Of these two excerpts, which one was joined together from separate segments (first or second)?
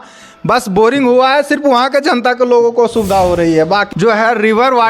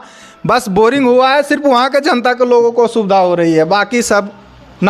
first